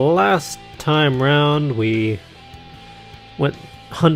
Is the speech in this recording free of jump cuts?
yes; 0 cuts

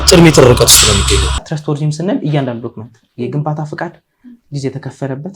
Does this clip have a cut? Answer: yes; 1 cut; at 1.5 s

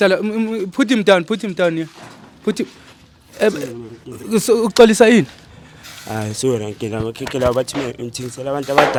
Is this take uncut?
yes; 0 cuts

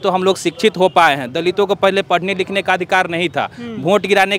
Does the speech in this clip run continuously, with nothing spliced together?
yes; 0 cuts

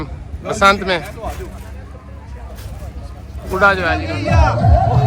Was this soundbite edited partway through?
yes; 1 cut; at 3.9 s

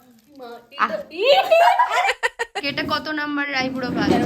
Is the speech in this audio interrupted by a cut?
yes; 1 cut; at 2.2 s

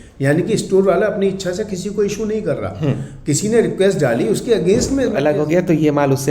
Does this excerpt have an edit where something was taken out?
yes; 1 cut; at 5.2 s

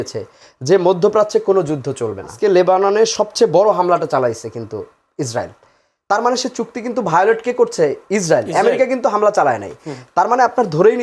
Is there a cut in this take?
yes; 1 cut; at 2.3 s

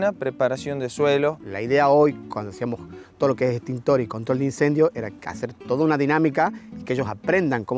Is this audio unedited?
no; 1 cut; at 1.4 s

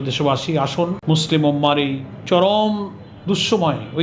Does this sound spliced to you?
yes; 2 cuts; at 1.0 s, 2.1 s

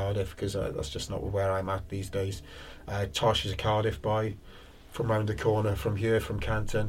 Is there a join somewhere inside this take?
no; 0 cuts

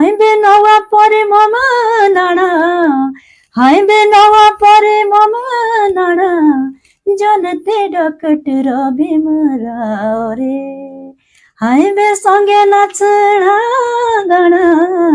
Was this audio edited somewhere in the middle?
no; 0 cuts

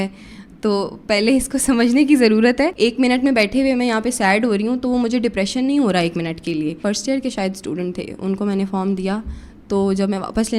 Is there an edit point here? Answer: yes; 2 cuts; at 2.7 s, 6.8 s

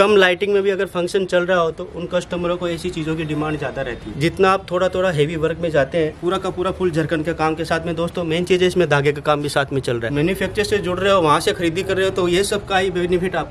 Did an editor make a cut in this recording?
yes; 3 cuts; at 4.1 s, 6.2 s, 10.1 s

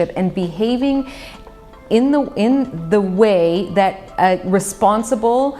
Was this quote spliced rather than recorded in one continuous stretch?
no; 0 cuts

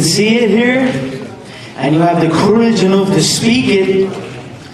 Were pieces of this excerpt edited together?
no; 0 cuts

